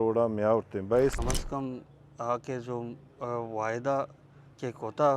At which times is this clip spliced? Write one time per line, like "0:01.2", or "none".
0:01.2